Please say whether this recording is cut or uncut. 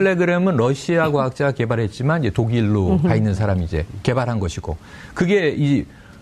uncut